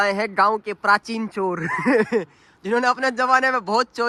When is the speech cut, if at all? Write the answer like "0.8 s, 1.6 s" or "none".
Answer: none